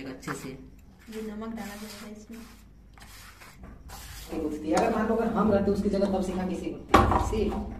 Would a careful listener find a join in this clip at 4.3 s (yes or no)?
yes